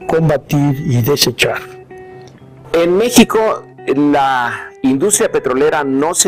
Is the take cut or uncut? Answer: uncut